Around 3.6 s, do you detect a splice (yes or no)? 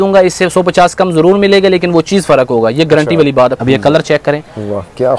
yes